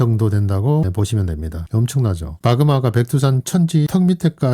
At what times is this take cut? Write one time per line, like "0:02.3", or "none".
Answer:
0:02.3